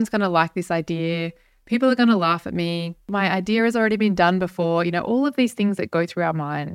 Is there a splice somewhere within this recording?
yes; 1 cut; at 3.1 s

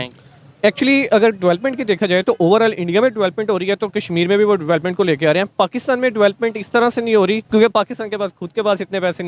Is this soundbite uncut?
no; 1 cut; at 7.4 s

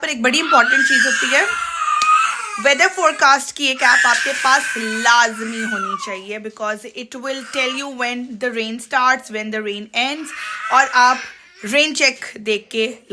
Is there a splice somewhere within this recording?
no; 0 cuts

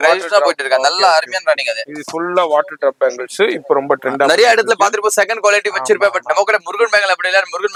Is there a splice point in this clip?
no; 0 cuts

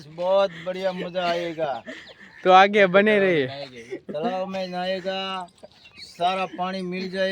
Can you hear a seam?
no; 0 cuts

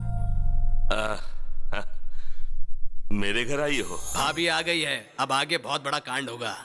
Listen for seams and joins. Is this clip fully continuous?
no; 1 cut; at 4.0 s

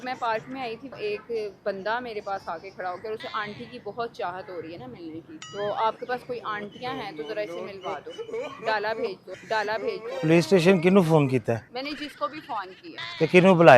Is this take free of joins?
no; 2 cuts; at 5.4 s, 10.1 s

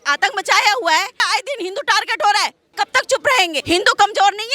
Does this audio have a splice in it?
yes; 3 cuts; at 1.3 s, 2.6 s, 3.6 s

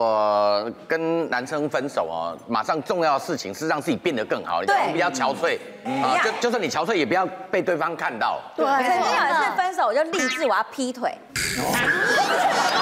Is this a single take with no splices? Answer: yes; 0 cuts

